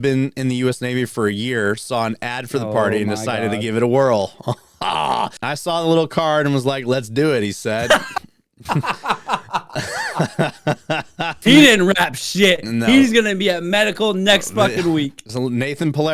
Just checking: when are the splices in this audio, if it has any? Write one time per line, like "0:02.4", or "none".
0:05.4
0:11.4